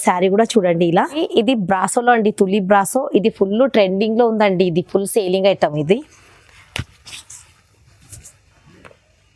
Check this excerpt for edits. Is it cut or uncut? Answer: cut